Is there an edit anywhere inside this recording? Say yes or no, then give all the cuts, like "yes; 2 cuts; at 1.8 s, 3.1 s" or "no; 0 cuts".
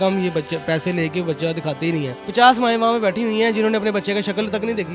yes; 1 cut; at 2.2 s